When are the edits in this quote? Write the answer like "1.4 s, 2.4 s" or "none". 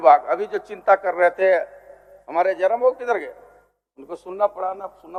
none